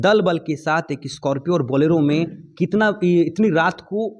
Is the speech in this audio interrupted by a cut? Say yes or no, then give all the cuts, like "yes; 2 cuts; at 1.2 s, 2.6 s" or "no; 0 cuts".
no; 0 cuts